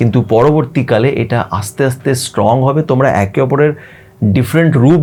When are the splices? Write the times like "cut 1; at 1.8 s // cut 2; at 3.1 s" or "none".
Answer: none